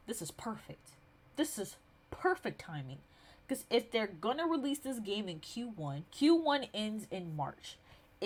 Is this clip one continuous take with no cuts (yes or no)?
yes